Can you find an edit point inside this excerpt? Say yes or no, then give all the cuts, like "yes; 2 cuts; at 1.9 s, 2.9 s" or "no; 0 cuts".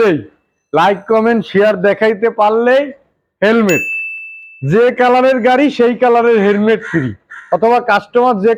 no; 0 cuts